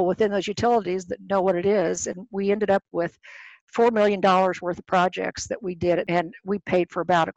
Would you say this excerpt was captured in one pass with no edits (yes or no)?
no